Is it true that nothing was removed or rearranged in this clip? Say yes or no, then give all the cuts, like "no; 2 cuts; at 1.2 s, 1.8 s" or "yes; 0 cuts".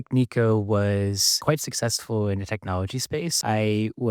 no; 2 cuts; at 1.4 s, 3.3 s